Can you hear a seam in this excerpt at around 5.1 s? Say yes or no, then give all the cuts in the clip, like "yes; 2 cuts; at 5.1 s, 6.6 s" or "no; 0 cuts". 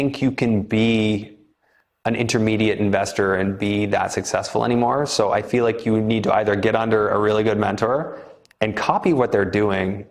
no; 0 cuts